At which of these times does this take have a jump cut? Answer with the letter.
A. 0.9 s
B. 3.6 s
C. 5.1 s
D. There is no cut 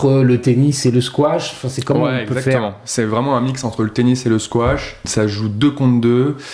C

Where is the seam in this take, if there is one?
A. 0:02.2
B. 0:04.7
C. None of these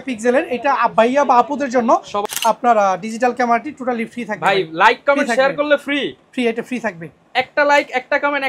A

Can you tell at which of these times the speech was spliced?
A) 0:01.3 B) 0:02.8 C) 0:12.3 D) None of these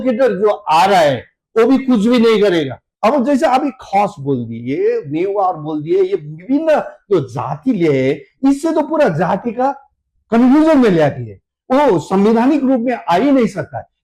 B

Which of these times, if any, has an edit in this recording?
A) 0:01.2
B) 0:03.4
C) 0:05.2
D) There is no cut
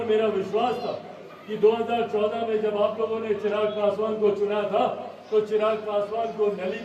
D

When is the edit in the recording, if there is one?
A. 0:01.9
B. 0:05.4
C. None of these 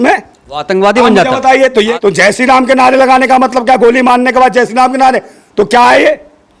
A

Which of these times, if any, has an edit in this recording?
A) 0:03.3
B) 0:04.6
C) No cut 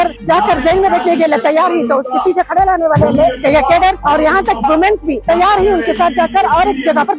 B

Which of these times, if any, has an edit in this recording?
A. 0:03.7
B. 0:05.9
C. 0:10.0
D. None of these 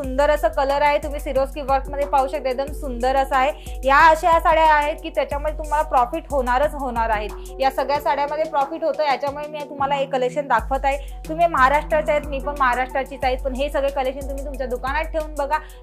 D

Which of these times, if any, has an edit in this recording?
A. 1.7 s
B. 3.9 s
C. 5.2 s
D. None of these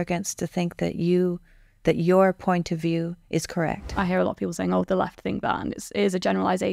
B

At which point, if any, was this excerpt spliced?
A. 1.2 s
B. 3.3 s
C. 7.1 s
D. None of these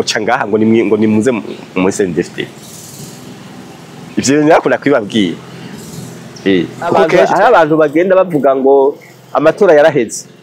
C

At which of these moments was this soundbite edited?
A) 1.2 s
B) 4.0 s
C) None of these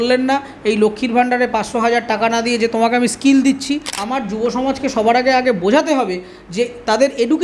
B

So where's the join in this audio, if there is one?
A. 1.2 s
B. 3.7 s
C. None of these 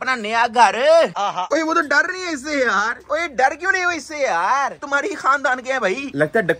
A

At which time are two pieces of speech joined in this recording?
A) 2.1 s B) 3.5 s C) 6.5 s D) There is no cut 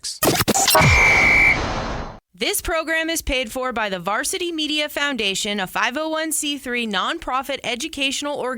A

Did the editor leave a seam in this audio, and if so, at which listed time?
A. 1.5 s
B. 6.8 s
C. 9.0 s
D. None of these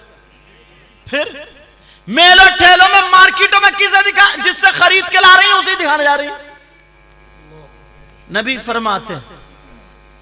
B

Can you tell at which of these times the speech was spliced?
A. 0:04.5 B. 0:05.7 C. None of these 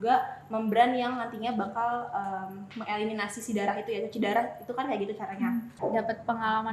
B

